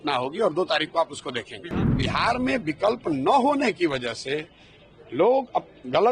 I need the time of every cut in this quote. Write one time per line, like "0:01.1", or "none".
0:01.7